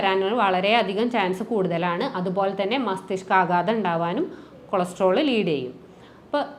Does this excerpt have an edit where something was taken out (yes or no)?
no